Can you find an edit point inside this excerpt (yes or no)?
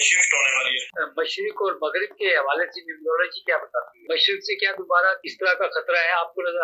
yes